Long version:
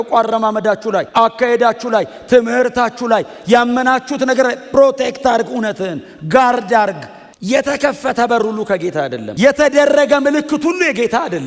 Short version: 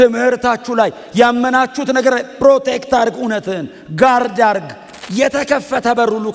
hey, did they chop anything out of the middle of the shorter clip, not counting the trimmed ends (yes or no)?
no